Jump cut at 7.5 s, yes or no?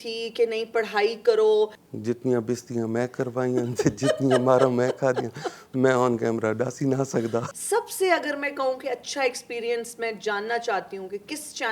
yes